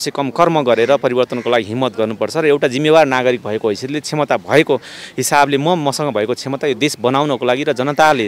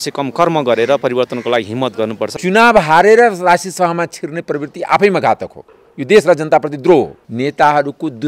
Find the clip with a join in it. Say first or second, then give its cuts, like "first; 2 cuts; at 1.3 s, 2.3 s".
second; 2 cuts; at 2.3 s, 7.2 s